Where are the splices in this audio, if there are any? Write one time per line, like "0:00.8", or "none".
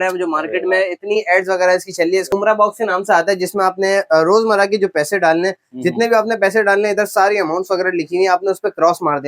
0:02.3

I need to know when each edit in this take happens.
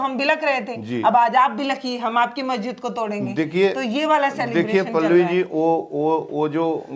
none

